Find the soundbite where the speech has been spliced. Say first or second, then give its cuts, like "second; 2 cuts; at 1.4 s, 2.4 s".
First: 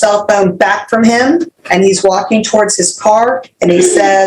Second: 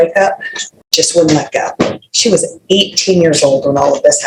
first; 1 cut; at 1.6 s